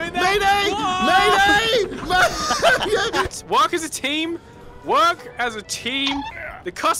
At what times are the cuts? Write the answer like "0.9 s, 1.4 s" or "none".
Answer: 3.3 s

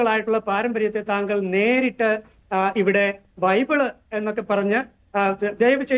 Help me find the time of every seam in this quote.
none

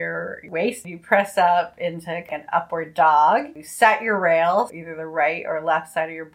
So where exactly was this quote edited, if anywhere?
0.8 s, 2.3 s, 3.6 s, 4.7 s

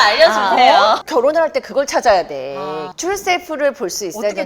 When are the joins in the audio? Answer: 1.0 s, 2.8 s

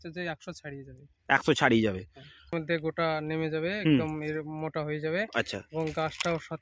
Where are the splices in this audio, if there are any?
2.5 s

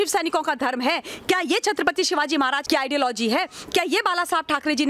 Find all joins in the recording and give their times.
2.6 s

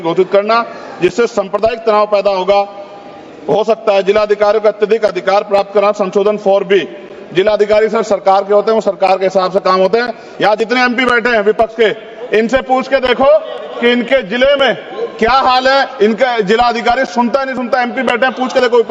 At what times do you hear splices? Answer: none

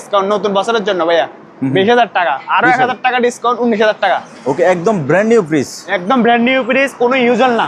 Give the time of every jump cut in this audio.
none

